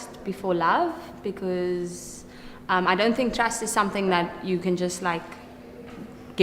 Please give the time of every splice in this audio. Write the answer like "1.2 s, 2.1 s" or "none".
3.2 s